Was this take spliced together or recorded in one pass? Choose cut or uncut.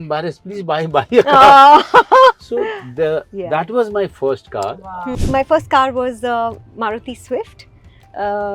cut